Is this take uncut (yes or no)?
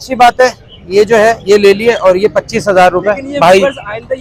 yes